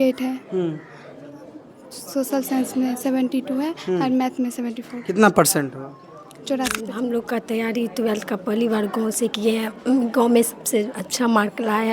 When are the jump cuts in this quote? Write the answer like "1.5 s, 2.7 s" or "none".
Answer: 6.8 s

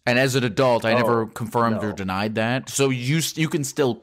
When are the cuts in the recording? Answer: none

